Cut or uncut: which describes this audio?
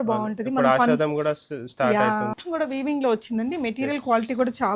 cut